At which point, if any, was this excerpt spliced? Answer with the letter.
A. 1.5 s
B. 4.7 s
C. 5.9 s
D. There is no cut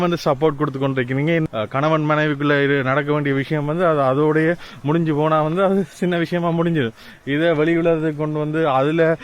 A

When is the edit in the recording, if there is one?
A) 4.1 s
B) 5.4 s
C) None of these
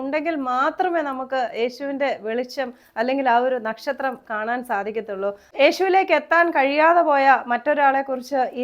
B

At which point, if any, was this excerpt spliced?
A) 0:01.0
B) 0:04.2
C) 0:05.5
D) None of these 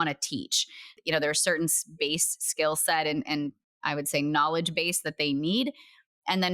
A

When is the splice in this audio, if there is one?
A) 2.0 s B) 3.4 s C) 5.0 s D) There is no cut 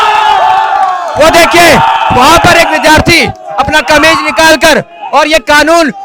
D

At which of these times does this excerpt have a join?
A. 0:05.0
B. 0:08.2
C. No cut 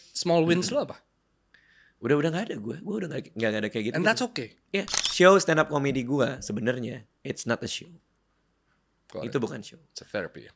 A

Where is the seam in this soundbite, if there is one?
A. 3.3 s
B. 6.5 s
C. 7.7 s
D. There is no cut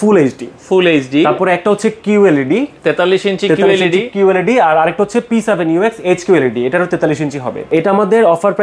C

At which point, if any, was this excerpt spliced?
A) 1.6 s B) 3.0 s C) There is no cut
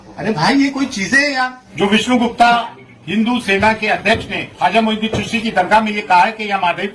A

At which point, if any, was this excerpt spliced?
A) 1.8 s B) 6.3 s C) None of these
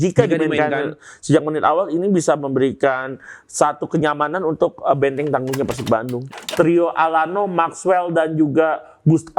B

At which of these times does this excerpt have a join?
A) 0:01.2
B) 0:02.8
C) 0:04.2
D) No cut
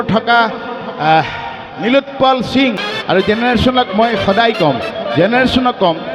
B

